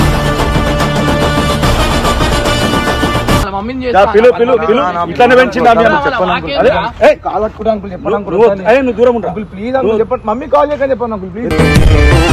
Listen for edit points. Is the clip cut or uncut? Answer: cut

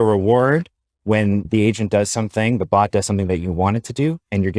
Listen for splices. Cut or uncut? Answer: uncut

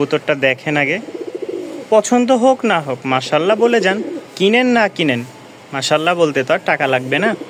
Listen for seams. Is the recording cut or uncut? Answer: uncut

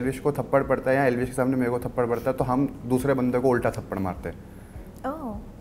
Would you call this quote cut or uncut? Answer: uncut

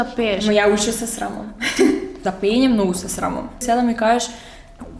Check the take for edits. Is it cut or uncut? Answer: cut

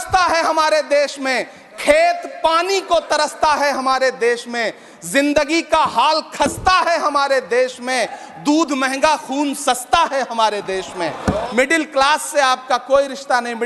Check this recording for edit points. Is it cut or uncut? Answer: cut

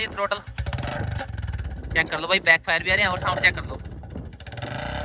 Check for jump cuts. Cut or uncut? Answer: uncut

